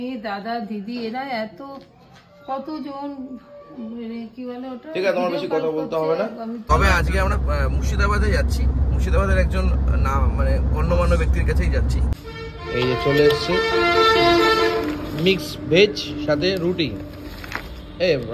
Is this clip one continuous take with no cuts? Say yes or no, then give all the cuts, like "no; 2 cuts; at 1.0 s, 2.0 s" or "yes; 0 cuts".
no; 2 cuts; at 6.6 s, 12.2 s